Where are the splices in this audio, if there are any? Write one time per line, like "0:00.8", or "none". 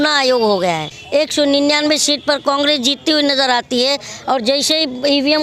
0:00.9